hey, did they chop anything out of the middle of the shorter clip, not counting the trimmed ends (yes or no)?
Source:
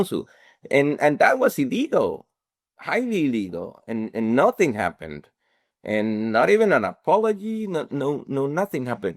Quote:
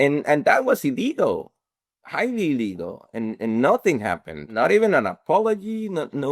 yes